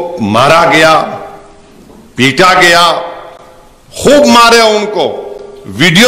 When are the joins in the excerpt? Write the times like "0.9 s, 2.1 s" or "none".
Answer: none